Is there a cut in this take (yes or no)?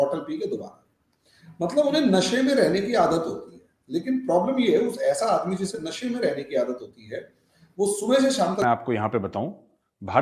yes